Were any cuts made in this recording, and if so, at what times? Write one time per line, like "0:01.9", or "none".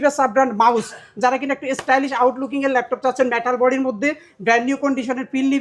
none